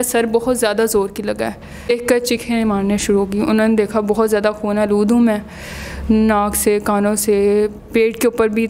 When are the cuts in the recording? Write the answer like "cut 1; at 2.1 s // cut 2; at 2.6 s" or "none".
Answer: cut 1; at 1.9 s